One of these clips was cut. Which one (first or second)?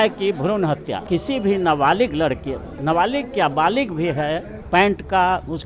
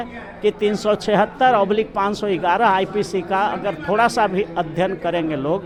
first